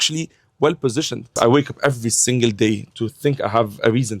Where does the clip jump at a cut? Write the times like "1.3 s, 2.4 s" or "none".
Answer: 1.3 s